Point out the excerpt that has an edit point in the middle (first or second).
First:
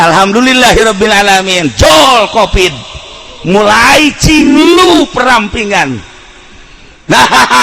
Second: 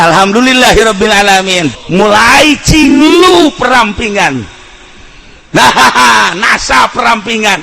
second